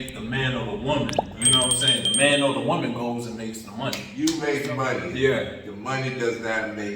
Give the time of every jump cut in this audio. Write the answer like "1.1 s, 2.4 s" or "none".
4.1 s